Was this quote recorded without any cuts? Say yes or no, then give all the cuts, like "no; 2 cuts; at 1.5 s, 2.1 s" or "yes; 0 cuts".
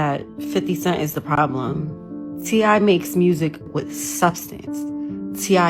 no; 2 cuts; at 2.4 s, 3.7 s